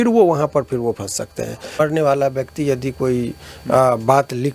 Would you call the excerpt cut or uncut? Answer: cut